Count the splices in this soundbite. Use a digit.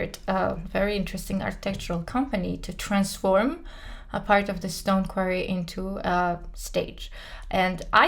0